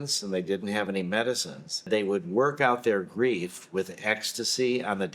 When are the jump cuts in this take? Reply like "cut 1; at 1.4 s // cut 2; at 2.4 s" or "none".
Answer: cut 1; at 1.9 s

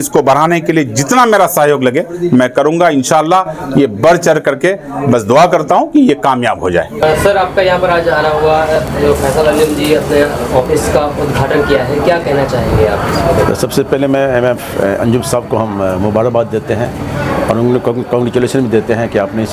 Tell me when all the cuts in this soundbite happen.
none

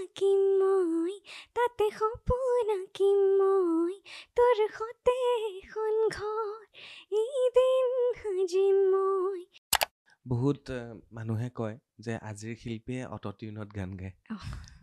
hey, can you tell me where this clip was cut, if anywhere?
cut 1; at 9.7 s

